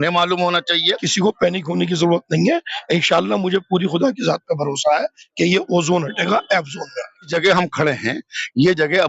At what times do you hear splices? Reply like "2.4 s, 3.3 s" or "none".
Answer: 1.0 s, 7.3 s